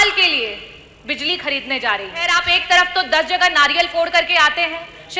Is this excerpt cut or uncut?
cut